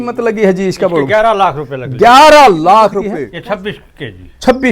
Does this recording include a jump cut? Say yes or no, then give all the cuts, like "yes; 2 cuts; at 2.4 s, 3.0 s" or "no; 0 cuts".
yes; 1 cut; at 3.0 s